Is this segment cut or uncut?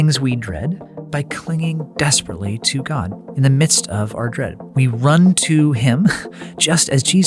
cut